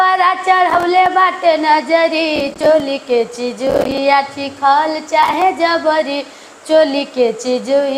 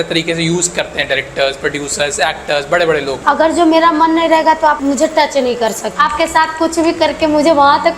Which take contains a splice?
second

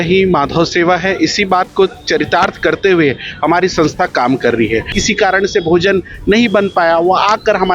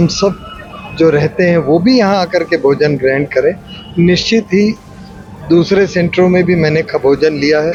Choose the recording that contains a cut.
first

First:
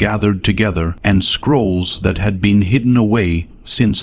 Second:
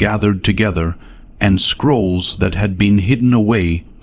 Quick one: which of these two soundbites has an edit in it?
first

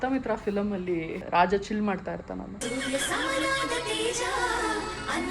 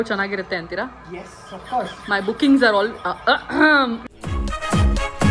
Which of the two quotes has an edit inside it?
first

